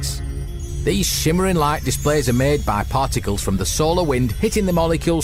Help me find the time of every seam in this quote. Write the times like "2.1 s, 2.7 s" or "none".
none